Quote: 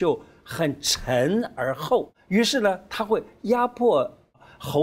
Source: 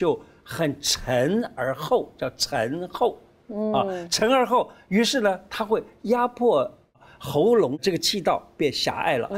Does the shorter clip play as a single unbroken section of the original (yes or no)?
no